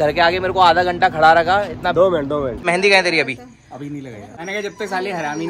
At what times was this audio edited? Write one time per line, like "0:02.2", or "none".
0:02.6
0:04.2